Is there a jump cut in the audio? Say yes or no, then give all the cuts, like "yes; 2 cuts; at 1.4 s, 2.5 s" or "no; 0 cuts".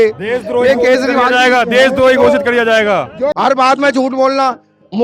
yes; 1 cut; at 3.3 s